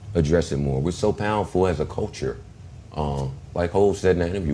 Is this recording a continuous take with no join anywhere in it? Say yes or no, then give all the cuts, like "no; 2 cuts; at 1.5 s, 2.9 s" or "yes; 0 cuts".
yes; 0 cuts